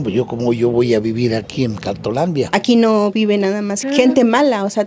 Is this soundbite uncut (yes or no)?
no